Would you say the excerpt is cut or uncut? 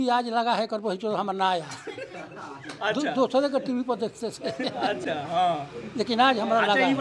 uncut